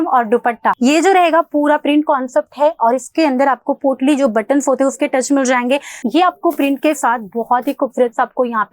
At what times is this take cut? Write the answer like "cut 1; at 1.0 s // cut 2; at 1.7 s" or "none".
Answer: cut 1; at 0.8 s // cut 2; at 5.9 s